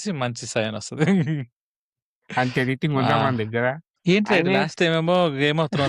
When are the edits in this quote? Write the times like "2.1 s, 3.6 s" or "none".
3.9 s